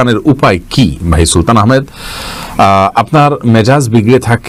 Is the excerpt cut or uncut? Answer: uncut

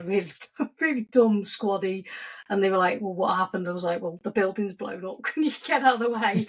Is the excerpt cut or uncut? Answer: uncut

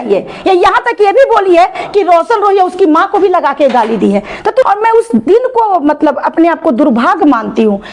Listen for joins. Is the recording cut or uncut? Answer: cut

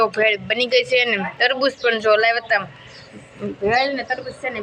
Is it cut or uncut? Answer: uncut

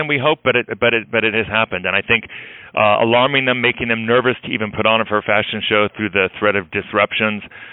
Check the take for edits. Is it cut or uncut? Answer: uncut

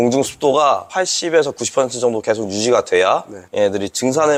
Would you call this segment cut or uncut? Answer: uncut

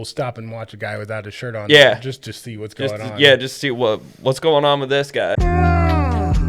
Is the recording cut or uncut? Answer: cut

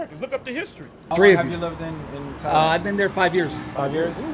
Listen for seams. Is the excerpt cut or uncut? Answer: cut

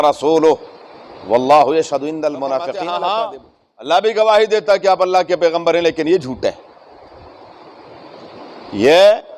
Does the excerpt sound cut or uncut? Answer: cut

